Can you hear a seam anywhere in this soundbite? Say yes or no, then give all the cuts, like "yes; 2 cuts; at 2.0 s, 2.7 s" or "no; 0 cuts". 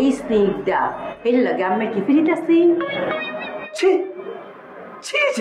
no; 0 cuts